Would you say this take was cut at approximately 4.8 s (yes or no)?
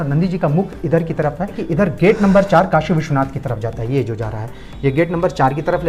no